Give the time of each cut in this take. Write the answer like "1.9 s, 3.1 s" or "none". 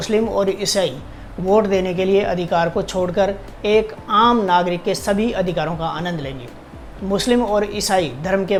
none